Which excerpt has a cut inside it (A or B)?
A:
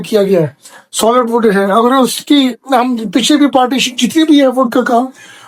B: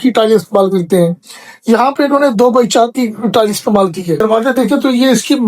B